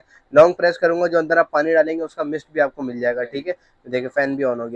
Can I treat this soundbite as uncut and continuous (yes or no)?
yes